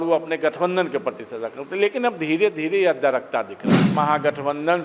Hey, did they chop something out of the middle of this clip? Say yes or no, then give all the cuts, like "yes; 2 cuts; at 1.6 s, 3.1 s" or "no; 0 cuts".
yes; 1 cut; at 3.9 s